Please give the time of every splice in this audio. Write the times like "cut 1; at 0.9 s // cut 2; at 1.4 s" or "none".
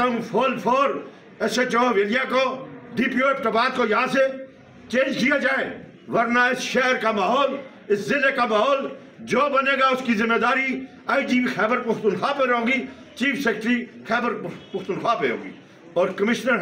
none